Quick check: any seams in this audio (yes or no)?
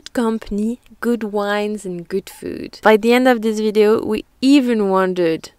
no